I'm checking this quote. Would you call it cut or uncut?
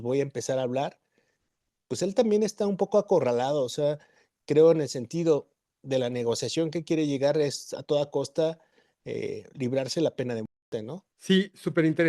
uncut